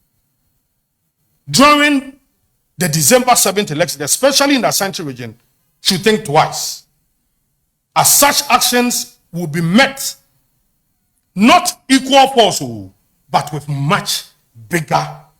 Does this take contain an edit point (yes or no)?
no